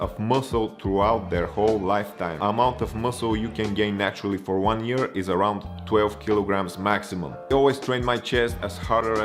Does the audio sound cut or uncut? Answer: cut